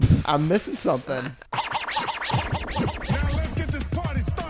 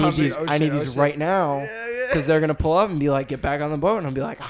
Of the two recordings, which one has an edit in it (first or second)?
first